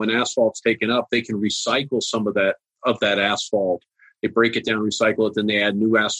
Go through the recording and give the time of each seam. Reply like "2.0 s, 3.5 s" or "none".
none